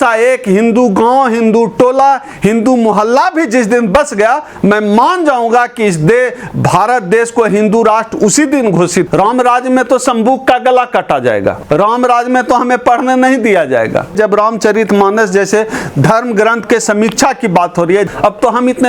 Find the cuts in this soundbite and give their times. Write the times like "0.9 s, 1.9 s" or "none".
9.1 s, 11.6 s, 14.1 s, 18.1 s